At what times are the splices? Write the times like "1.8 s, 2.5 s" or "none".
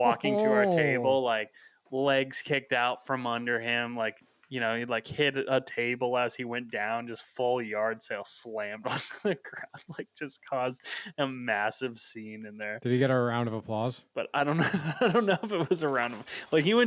14.1 s